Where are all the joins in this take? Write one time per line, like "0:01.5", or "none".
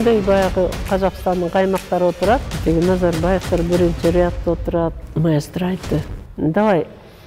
none